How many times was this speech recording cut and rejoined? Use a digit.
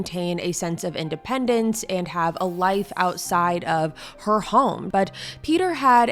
1